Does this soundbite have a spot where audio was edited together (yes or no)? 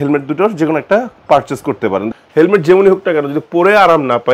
yes